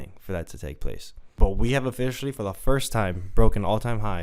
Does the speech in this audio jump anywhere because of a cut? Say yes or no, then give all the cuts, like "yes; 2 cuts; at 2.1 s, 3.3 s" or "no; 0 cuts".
yes; 1 cut; at 1.2 s